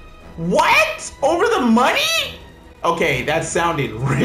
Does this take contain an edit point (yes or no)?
no